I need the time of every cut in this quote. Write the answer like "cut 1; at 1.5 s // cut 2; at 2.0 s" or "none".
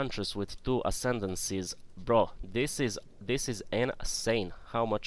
none